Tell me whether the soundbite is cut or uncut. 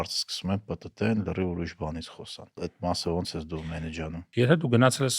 cut